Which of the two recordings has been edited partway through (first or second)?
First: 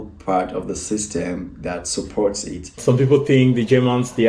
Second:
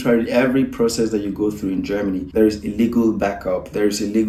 first